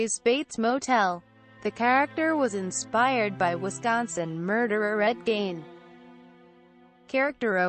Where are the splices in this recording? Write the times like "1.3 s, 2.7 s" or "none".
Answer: 4.1 s